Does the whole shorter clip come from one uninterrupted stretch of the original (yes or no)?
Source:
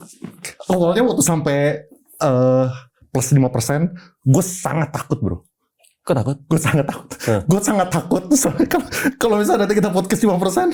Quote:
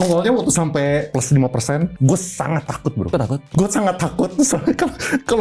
no